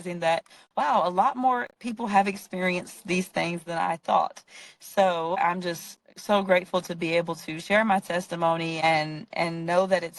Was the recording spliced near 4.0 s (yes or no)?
no